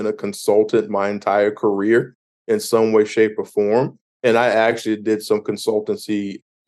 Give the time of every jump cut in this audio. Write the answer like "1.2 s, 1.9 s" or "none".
none